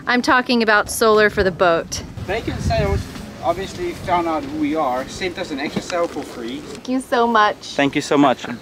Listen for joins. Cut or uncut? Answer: cut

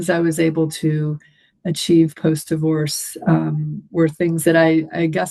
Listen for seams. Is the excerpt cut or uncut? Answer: uncut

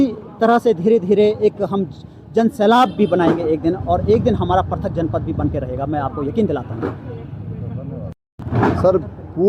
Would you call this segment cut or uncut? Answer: uncut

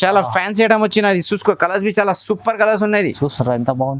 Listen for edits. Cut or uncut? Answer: uncut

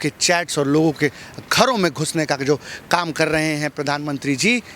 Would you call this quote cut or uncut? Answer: uncut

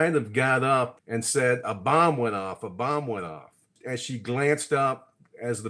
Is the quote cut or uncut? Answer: cut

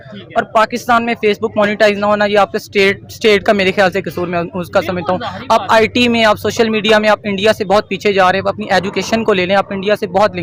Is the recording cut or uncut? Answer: uncut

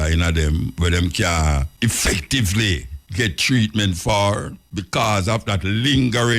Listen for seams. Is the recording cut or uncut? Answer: cut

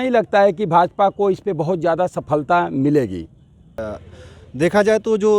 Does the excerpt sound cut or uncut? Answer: cut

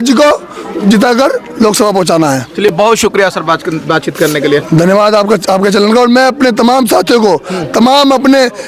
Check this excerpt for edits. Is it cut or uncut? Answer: uncut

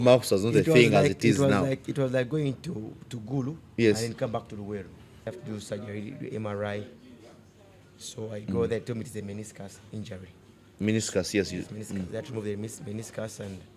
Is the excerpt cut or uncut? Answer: cut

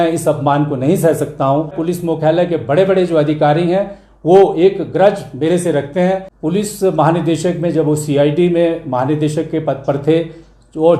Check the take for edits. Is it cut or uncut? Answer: cut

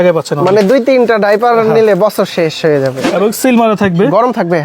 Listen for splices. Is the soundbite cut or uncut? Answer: cut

